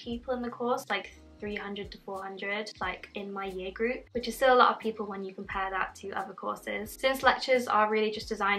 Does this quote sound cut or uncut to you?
uncut